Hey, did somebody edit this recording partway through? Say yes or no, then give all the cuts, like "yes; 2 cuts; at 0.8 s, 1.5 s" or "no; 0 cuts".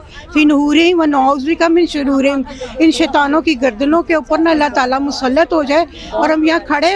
no; 0 cuts